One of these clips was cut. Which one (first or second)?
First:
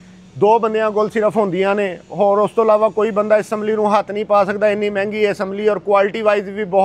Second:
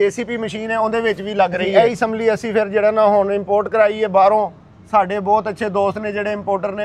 second